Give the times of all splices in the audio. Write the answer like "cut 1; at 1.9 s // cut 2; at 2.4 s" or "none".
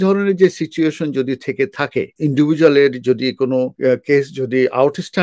cut 1; at 2.1 s // cut 2; at 3.7 s